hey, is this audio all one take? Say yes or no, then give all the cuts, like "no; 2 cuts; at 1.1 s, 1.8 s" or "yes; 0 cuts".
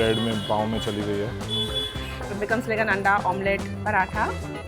no; 1 cut; at 2.1 s